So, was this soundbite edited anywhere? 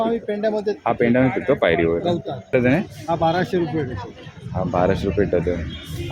yes; 1 cut; at 2.5 s

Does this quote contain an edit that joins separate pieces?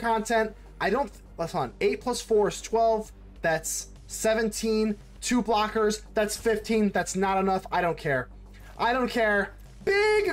no; 0 cuts

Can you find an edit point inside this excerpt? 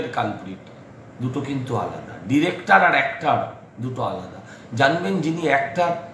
no; 0 cuts

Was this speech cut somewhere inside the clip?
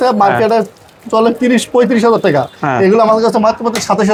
no; 0 cuts

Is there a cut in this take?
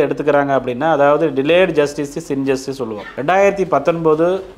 yes; 1 cut; at 3.1 s

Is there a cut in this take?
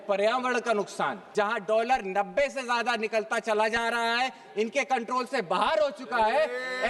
yes; 1 cut; at 1.2 s

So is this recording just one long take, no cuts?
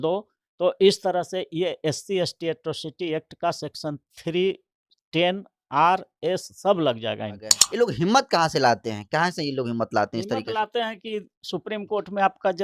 no; 1 cut; at 7.6 s

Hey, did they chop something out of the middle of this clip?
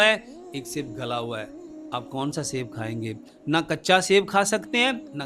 no; 0 cuts

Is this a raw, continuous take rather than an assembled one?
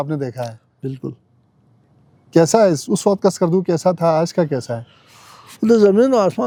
yes; 0 cuts

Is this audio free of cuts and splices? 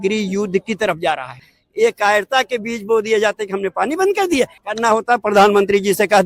no; 2 cuts; at 1.5 s, 4.6 s

